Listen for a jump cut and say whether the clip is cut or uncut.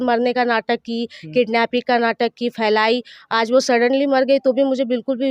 uncut